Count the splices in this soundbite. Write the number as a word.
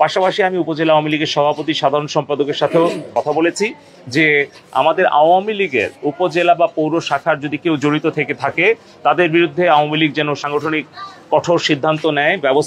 two